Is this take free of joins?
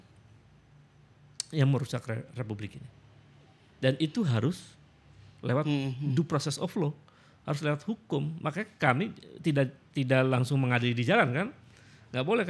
yes; 0 cuts

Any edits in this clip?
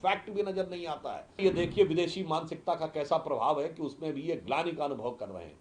yes; 1 cut; at 1.4 s

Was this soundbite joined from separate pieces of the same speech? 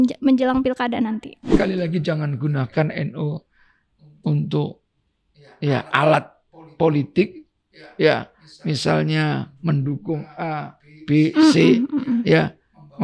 yes; 1 cut; at 1.4 s

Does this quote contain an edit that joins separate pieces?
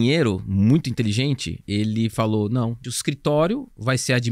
yes; 2 cuts; at 1.5 s, 2.9 s

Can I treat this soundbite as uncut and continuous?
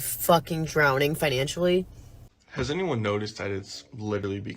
no; 1 cut; at 2.0 s

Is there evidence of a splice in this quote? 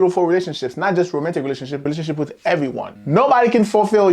yes; 2 cuts; at 1.8 s, 2.9 s

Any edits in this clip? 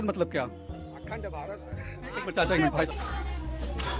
yes; 1 cut; at 2.9 s

